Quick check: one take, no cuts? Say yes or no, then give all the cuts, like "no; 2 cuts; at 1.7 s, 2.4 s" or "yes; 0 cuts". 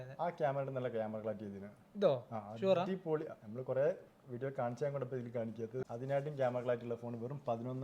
no; 1 cut; at 5.8 s